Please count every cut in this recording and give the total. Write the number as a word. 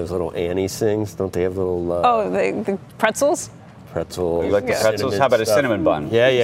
zero